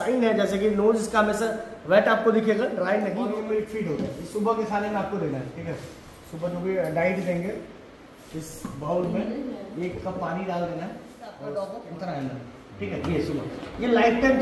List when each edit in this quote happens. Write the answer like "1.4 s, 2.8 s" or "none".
3.3 s, 11.4 s

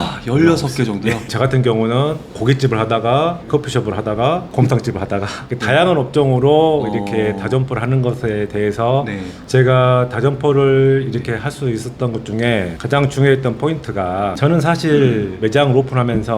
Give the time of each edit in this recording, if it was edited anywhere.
1.2 s, 9.4 s, 14.3 s

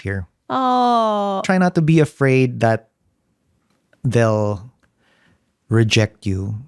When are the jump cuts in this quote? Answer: 1.4 s

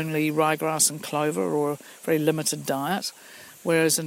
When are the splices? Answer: none

